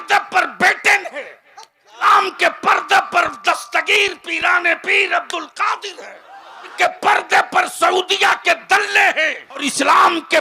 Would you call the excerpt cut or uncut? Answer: cut